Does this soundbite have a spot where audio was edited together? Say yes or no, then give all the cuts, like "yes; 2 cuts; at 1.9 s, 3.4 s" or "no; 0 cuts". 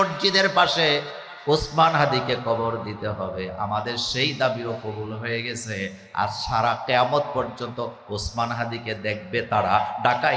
no; 0 cuts